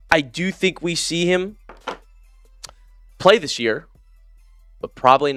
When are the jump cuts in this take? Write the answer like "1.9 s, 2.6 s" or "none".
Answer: none

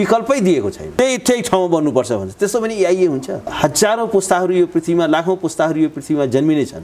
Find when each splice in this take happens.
0.9 s, 3.4 s

